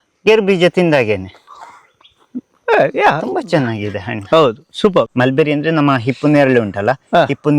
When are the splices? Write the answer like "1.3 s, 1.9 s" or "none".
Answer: 5.1 s